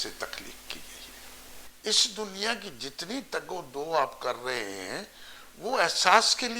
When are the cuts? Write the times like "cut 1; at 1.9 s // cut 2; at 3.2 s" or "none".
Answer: cut 1; at 1.6 s